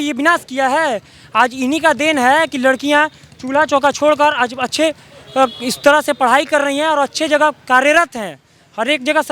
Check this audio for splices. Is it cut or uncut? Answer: uncut